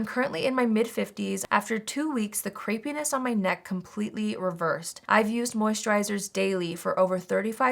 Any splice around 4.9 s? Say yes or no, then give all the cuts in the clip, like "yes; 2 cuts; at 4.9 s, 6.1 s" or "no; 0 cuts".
yes; 2 cuts; at 1.4 s, 4.9 s